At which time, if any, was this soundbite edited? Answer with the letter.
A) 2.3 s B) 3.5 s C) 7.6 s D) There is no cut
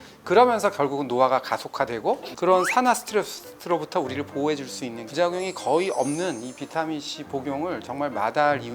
A